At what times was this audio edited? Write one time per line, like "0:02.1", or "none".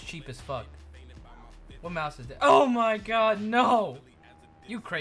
none